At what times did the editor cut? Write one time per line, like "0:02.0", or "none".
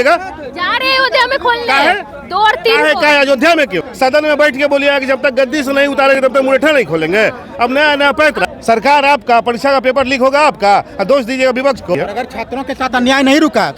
0:03.8
0:08.4
0:12.0